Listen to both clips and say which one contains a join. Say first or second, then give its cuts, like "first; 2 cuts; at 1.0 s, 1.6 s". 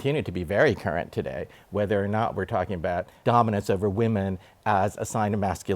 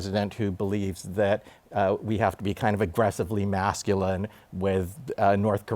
first; 1 cut; at 3.1 s